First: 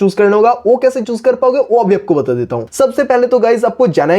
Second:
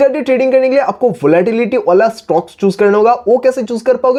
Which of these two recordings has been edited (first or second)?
first